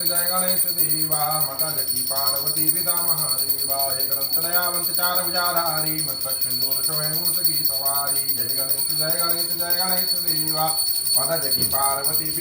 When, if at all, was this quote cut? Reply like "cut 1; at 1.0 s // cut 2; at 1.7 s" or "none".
none

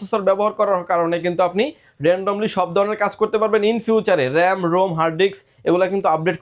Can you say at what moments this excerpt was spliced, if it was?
none

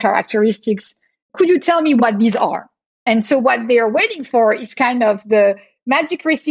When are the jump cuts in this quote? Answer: cut 1; at 1.3 s

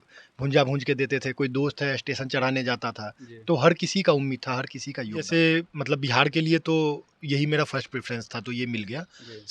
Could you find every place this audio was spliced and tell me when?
cut 1; at 5.3 s

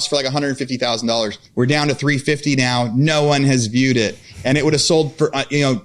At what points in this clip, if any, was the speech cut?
cut 1; at 1.4 s

